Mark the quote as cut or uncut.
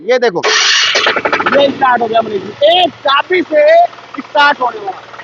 uncut